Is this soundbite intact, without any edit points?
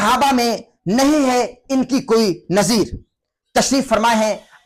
yes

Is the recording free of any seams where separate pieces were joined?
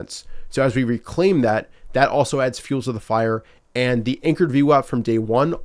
yes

